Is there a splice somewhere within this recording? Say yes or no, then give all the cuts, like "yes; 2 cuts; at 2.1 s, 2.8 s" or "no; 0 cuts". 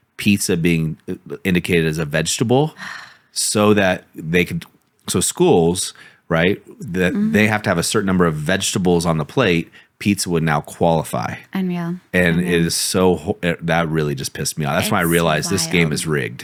no; 0 cuts